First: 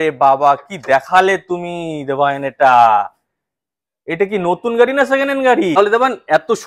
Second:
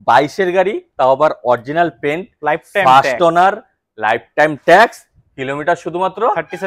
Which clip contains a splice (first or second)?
first